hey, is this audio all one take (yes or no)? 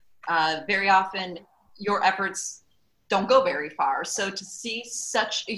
yes